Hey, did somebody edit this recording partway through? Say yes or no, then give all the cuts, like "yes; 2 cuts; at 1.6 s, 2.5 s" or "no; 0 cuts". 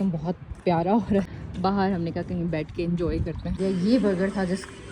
yes; 2 cuts; at 1.3 s, 3.5 s